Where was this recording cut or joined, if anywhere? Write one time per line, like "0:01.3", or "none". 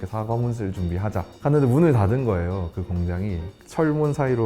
0:03.5